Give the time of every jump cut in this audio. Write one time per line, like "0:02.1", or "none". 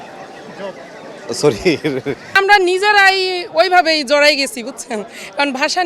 0:02.3